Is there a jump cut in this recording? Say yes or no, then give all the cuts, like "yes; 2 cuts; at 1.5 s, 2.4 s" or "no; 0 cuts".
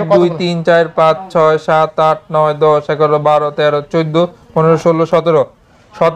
no; 0 cuts